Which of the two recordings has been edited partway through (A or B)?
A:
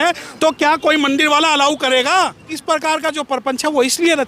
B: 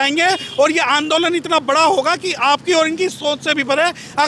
A